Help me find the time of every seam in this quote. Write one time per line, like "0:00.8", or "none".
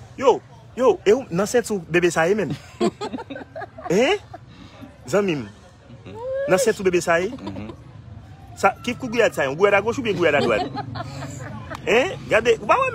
none